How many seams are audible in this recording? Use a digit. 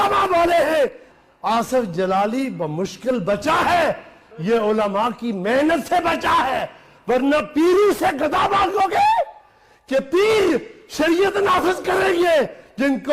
1